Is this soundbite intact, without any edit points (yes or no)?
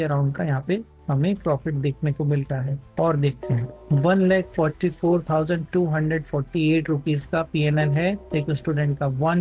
no